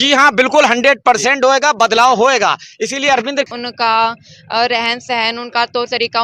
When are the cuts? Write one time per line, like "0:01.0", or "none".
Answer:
0:03.5